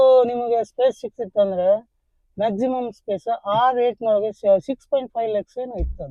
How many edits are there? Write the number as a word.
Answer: zero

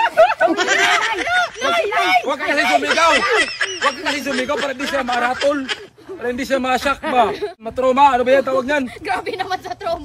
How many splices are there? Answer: one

